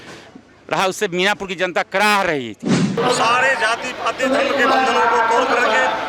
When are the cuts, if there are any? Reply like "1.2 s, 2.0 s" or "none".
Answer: 3.0 s